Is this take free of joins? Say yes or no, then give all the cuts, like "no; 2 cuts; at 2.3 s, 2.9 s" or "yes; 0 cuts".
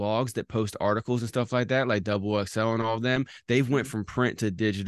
yes; 0 cuts